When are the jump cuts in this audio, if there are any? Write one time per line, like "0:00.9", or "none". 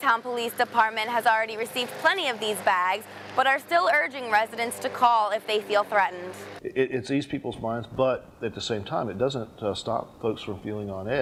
none